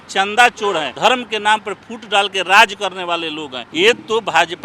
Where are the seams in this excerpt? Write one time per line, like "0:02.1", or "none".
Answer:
0:00.9
0:03.6